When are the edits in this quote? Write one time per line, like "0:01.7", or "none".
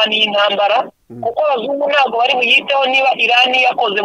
none